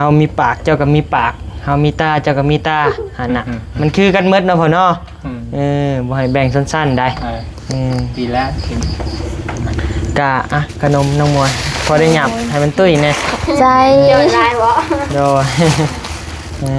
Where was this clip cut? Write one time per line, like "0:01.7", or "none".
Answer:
none